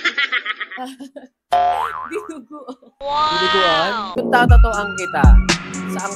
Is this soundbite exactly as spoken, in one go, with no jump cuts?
no; 1 cut; at 4.1 s

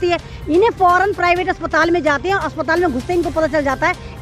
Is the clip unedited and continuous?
yes; 0 cuts

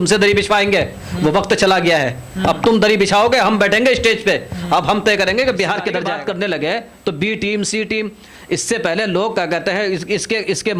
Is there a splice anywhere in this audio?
yes; 1 cut; at 5.9 s

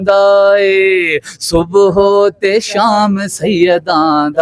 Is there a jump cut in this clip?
no; 0 cuts

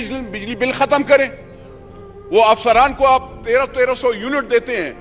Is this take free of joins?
yes; 0 cuts

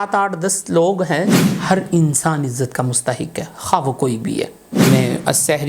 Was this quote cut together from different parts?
yes; 2 cuts; at 1.3 s, 4.6 s

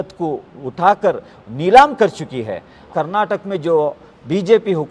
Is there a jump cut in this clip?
yes; 1 cut; at 2.8 s

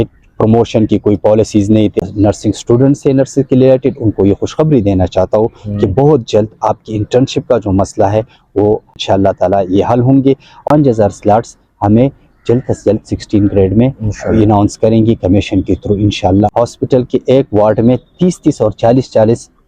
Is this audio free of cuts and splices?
no; 4 cuts; at 2.0 s, 9.0 s, 10.6 s, 16.5 s

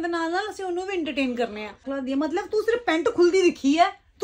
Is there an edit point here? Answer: yes; 1 cut; at 1.8 s

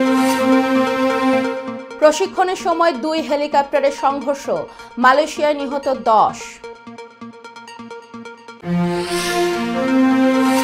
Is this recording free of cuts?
no; 1 cut; at 1.3 s

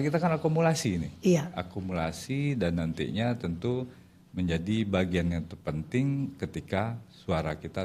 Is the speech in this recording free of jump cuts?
yes; 0 cuts

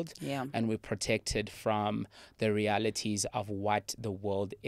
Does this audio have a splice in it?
no; 0 cuts

